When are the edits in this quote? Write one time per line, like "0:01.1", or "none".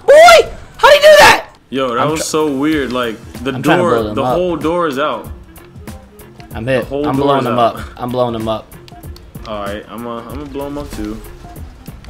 0:01.6